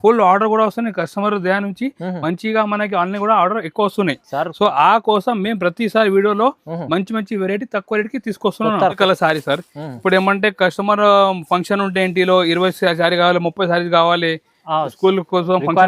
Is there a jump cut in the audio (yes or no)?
yes